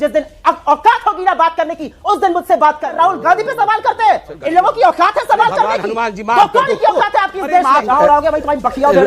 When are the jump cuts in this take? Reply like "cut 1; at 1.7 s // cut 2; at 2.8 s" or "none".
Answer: cut 1; at 2.9 s // cut 2; at 7.9 s